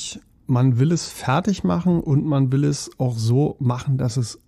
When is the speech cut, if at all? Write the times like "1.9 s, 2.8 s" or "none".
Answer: none